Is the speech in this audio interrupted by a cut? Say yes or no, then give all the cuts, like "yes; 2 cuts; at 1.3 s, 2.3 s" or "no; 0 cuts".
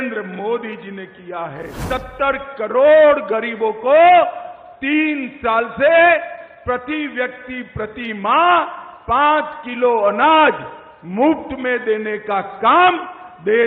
yes; 1 cut; at 1.7 s